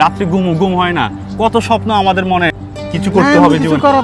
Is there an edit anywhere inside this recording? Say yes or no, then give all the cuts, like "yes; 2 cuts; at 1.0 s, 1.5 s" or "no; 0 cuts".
yes; 1 cut; at 2.7 s